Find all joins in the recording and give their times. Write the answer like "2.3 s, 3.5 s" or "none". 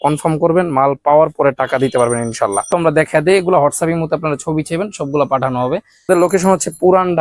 2.7 s, 6.1 s